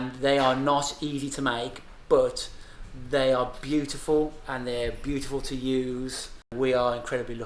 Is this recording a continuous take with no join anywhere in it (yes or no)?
no